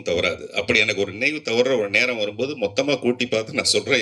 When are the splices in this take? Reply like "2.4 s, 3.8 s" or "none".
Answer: none